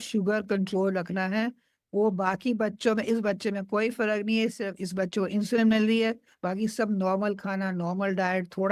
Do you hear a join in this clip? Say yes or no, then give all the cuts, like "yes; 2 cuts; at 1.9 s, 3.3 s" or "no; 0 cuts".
no; 0 cuts